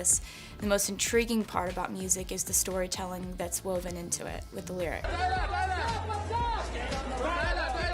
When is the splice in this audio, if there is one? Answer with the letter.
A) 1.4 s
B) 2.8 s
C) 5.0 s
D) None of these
C